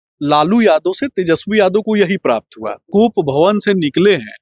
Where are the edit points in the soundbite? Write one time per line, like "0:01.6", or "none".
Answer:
0:02.8